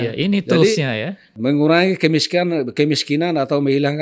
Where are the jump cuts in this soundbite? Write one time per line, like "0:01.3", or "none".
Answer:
0:01.3

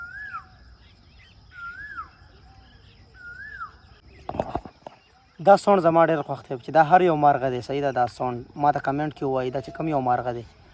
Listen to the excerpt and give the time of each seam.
0:04.0

